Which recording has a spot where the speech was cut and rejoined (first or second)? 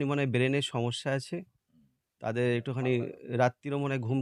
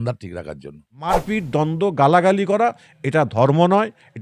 second